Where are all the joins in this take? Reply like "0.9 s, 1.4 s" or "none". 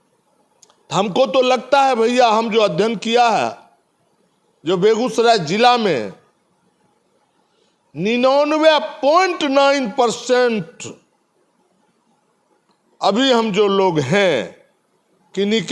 none